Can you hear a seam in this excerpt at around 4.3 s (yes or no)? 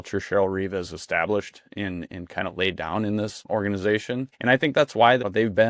yes